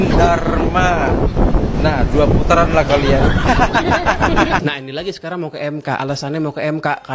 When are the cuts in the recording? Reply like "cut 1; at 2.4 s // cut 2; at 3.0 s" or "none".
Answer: cut 1; at 4.6 s